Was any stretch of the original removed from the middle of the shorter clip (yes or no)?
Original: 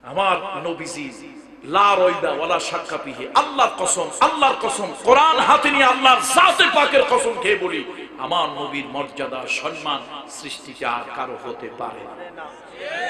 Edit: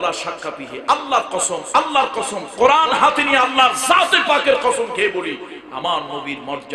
no